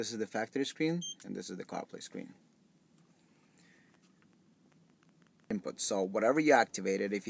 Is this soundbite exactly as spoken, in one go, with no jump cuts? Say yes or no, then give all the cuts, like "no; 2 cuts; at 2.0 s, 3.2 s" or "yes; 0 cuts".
no; 1 cut; at 5.5 s